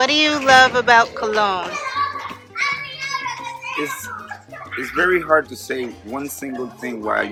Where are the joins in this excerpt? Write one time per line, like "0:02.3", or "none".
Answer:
none